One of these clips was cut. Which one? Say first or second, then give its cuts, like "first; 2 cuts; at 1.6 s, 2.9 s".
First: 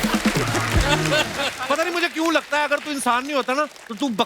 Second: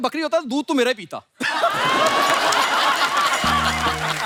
first; 1 cut; at 1.6 s